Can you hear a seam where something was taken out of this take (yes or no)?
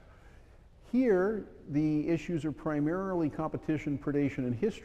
yes